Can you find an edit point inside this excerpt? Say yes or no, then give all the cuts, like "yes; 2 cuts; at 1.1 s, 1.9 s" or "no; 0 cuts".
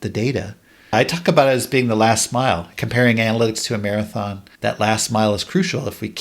yes; 3 cuts; at 0.9 s, 2.7 s, 4.4 s